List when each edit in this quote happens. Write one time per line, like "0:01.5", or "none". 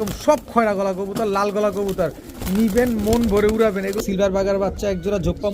0:04.0